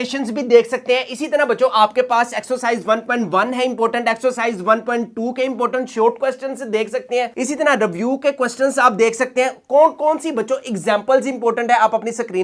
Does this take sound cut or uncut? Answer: uncut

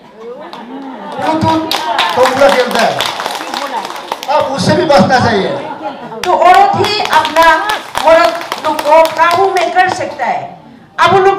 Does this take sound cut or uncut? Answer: cut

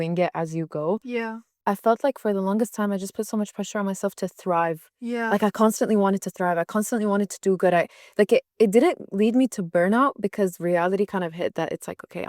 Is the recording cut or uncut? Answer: cut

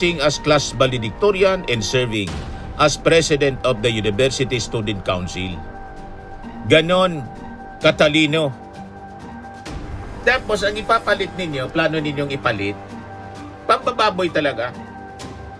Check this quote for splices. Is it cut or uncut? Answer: uncut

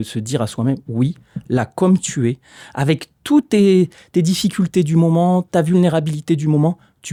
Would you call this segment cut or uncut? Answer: uncut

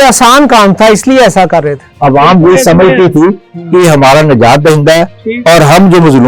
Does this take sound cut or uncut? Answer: cut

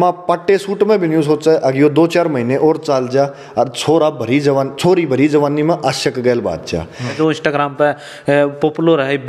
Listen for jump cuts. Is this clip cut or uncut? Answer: cut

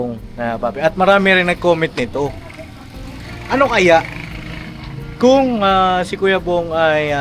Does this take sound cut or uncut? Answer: uncut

